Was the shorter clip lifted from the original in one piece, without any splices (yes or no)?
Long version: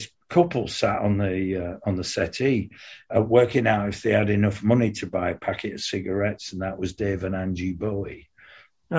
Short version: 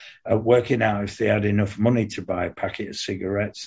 yes